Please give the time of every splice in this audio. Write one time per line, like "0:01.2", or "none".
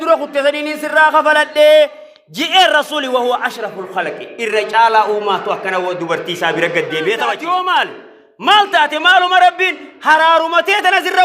0:07.4